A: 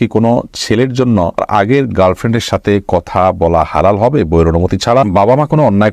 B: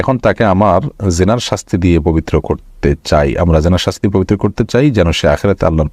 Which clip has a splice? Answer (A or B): A